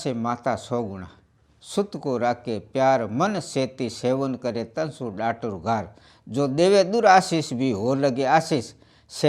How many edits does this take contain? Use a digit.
0